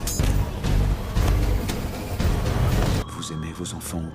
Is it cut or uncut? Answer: cut